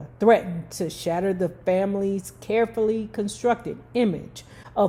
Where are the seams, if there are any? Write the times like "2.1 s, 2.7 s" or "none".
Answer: none